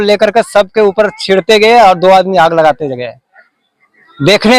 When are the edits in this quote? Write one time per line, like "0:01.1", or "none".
none